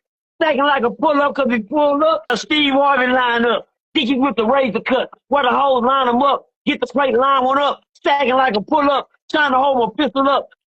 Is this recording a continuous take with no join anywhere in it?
no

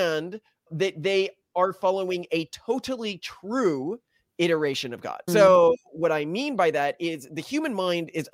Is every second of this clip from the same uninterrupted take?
no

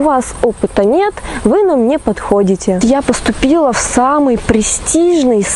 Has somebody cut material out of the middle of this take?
yes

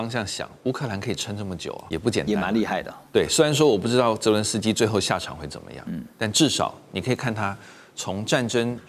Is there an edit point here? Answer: yes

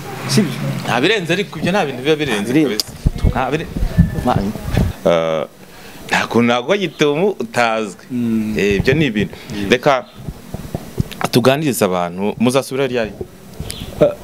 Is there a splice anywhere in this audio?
yes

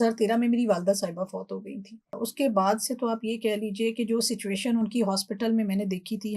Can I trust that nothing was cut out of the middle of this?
no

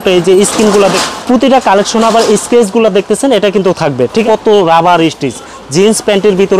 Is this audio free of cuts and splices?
no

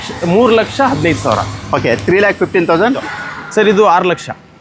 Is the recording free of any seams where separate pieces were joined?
no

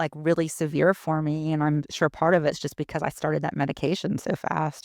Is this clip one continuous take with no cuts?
yes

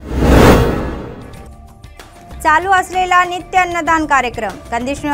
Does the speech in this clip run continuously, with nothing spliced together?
no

